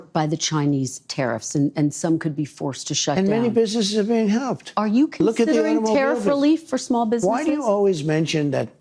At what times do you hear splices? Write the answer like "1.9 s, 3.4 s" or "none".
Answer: none